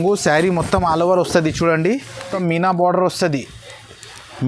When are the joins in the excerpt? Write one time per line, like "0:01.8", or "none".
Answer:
0:02.2